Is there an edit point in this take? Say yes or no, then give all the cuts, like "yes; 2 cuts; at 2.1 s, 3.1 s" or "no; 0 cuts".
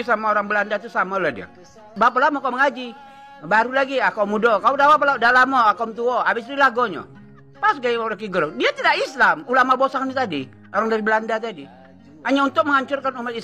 yes; 1 cut; at 1.9 s